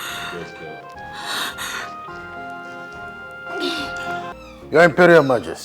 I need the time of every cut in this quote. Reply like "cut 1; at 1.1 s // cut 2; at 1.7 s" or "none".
cut 1; at 4.3 s